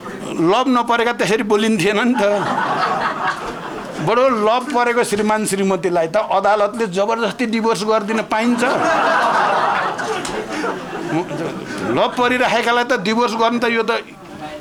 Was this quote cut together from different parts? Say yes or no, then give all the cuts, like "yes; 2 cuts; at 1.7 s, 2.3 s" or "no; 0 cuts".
no; 0 cuts